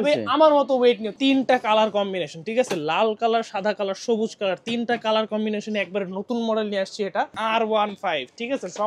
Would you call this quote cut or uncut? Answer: cut